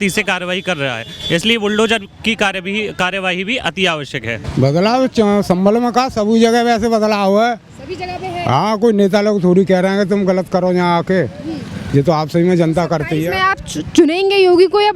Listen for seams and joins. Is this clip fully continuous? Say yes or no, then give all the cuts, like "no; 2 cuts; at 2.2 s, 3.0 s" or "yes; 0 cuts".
no; 1 cut; at 4.4 s